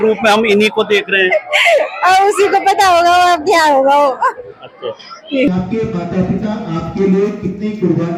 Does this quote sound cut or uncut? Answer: uncut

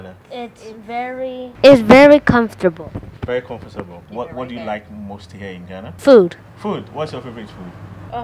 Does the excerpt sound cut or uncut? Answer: uncut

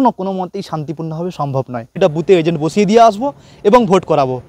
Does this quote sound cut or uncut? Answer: cut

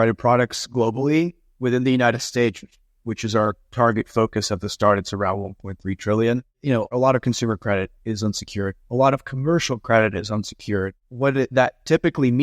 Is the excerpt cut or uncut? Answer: cut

